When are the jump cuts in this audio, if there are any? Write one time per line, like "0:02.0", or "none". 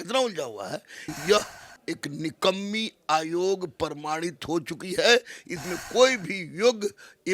0:01.1